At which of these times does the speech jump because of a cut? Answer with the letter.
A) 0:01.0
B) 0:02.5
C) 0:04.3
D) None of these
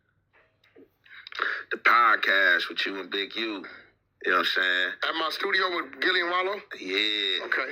D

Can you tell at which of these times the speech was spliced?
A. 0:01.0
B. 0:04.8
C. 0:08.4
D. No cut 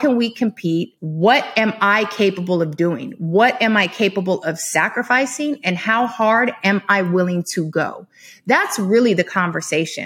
A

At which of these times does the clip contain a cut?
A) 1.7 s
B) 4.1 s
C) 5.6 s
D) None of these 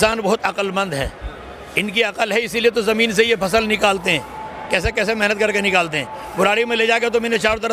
D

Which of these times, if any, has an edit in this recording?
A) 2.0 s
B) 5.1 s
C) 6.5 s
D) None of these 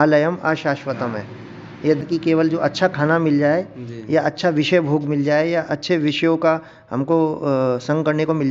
A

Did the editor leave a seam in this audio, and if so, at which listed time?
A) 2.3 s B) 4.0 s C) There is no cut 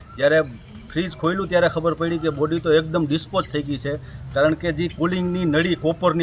C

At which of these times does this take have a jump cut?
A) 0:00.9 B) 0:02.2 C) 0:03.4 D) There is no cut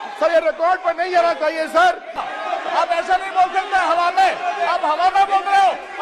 B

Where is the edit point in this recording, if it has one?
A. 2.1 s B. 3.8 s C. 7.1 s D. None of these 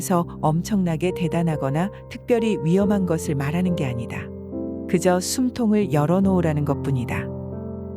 C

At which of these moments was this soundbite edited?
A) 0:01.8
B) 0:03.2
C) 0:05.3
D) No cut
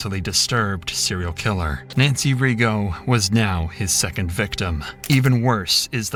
D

